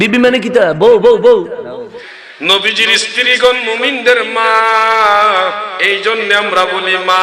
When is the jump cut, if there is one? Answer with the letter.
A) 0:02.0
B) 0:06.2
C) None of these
A